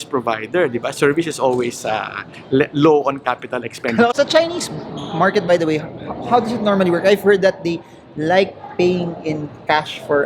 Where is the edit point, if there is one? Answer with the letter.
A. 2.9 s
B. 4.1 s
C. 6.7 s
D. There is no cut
B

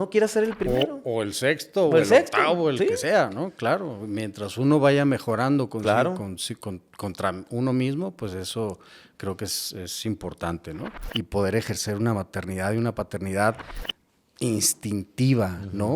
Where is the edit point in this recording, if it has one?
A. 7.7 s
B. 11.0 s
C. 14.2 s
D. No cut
B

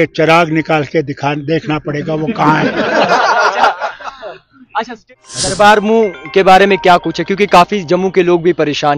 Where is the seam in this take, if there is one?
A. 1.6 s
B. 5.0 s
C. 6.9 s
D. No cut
B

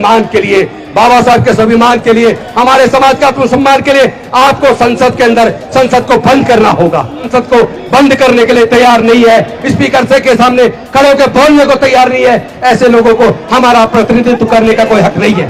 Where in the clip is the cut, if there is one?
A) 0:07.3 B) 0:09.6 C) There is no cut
A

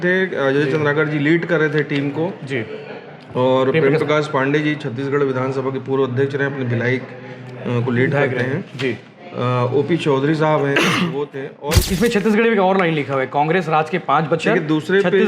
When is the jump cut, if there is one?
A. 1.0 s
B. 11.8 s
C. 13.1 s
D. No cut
B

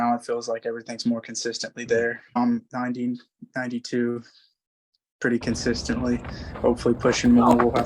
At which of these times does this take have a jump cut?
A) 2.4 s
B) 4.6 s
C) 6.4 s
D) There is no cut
A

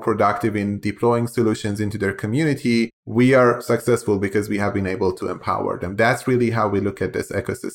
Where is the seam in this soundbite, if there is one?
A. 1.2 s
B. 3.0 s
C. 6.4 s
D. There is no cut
B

